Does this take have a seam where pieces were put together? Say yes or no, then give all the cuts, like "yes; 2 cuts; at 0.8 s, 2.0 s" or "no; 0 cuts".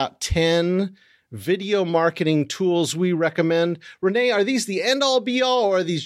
no; 0 cuts